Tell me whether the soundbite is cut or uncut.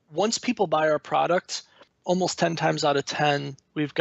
uncut